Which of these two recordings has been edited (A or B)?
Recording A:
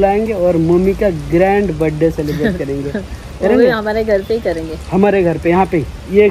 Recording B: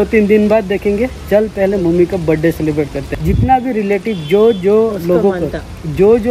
B